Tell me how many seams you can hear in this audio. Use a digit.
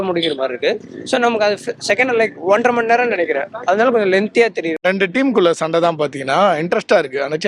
1